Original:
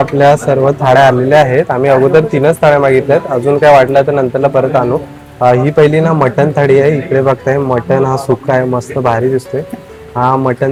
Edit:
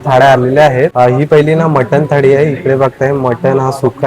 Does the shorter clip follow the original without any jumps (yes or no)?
no